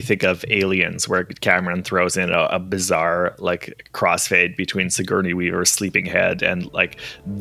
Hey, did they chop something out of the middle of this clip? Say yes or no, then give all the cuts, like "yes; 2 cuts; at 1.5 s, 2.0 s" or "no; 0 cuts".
no; 0 cuts